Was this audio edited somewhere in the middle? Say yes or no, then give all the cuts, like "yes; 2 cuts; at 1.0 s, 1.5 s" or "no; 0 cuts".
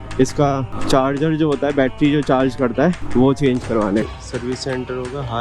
yes; 1 cut; at 4.1 s